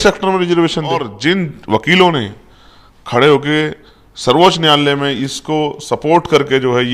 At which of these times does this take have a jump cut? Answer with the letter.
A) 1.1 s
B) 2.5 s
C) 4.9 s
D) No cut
A